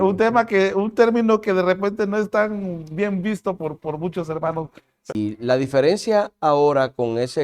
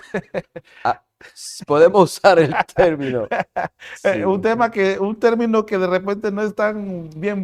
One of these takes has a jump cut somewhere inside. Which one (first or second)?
first